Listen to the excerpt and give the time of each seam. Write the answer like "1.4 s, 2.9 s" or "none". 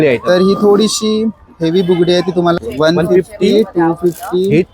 2.6 s